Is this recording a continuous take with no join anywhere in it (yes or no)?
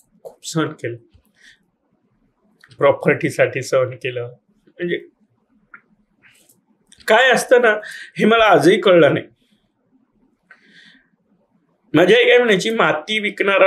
yes